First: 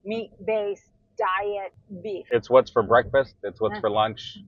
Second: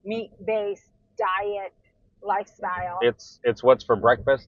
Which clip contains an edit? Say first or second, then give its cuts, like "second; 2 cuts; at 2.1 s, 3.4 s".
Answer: first; 1 cut; at 2.1 s